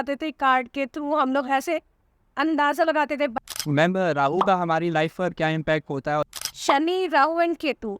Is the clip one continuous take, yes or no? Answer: no